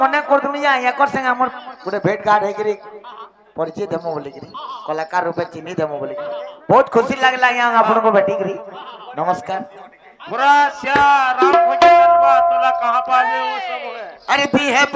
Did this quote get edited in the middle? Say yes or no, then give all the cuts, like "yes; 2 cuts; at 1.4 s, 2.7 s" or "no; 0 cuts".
no; 0 cuts